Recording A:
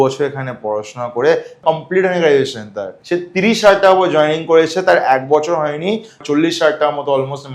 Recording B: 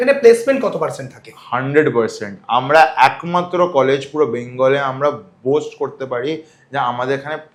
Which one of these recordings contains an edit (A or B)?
A